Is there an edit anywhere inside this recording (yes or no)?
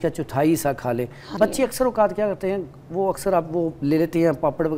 yes